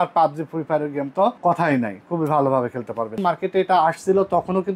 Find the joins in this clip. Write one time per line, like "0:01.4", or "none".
0:01.4
0:03.2